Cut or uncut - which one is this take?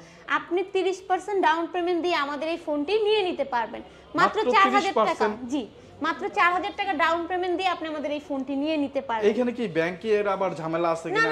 uncut